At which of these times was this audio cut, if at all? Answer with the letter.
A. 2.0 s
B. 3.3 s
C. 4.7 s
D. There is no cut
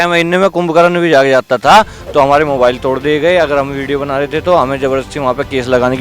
A